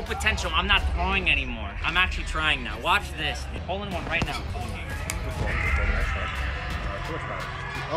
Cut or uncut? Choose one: cut